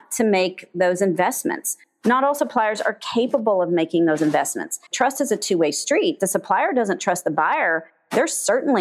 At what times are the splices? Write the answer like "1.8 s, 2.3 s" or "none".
none

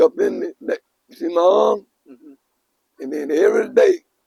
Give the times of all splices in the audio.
none

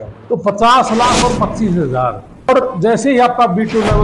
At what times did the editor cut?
2.5 s

